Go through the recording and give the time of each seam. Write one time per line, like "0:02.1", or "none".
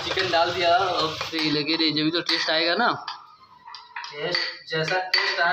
0:01.2